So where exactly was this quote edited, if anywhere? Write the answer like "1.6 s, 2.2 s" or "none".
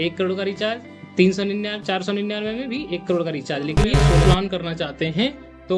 4.2 s

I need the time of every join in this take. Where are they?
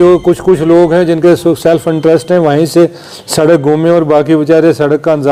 none

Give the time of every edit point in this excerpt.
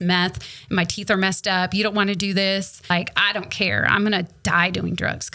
2.9 s

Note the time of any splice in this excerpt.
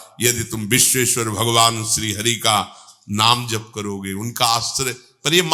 none

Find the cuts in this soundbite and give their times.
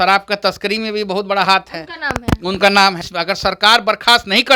3.1 s

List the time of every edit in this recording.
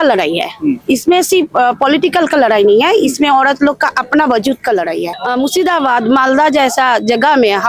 5.1 s

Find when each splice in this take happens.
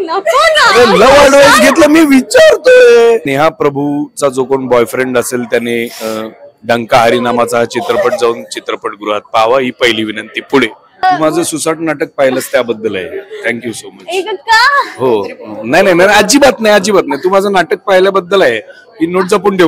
3.3 s, 11.0 s

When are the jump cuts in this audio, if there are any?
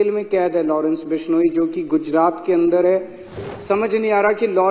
3.4 s

